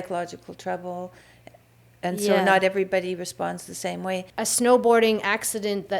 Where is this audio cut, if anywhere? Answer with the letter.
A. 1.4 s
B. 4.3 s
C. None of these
B